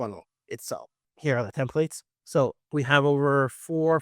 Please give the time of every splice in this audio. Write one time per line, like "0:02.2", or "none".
0:01.0